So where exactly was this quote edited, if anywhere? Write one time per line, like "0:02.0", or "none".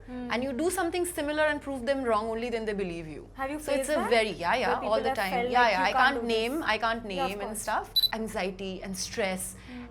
0:08.0